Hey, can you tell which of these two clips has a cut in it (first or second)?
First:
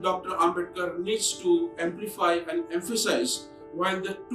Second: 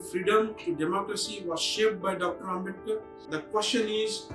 second